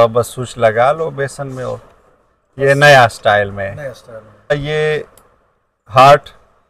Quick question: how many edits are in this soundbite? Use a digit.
1